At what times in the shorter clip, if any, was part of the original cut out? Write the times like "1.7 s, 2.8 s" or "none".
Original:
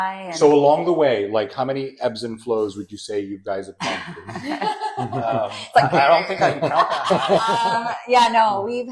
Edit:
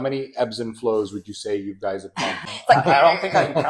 2.5 s